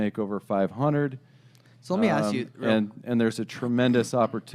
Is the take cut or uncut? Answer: uncut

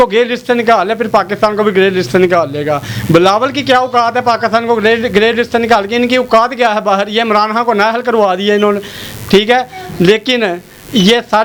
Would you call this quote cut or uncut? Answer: uncut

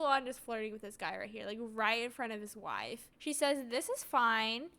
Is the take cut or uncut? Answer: cut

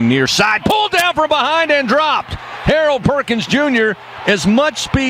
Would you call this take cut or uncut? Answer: uncut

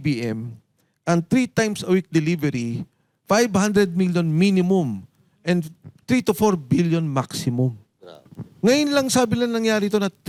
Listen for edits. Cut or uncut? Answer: uncut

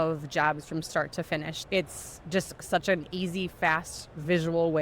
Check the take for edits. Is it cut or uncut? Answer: cut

